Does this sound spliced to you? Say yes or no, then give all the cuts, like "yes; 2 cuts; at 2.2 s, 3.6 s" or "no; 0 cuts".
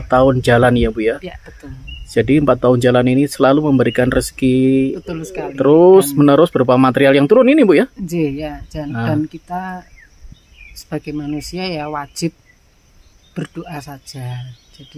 no; 0 cuts